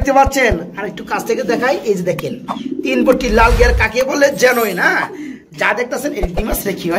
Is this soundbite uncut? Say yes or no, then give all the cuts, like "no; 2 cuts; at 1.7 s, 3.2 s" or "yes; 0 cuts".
yes; 0 cuts